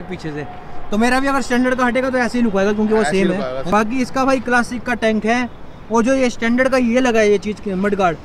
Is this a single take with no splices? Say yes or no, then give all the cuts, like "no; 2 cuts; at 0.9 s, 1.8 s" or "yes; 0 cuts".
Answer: no; 1 cut; at 3.7 s